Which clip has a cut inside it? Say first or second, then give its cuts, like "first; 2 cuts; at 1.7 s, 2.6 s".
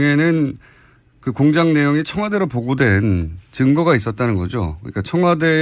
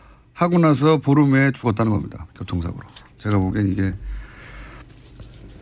first; 1 cut; at 2.9 s